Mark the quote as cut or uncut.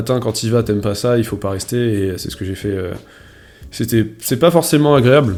uncut